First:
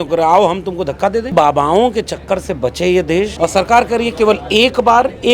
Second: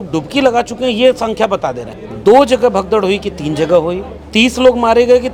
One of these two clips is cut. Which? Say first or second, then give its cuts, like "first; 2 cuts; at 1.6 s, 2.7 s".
first; 2 cuts; at 1.3 s, 3.3 s